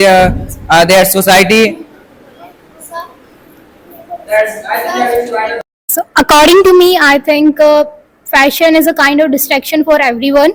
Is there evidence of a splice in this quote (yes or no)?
no